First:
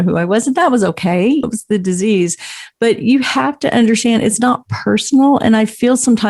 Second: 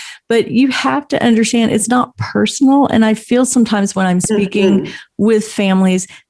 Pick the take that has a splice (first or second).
first